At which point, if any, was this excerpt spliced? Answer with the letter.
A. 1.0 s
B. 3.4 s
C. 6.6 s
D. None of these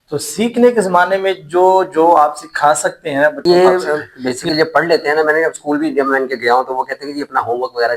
B